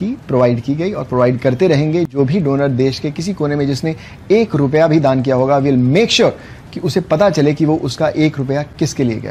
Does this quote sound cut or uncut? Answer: uncut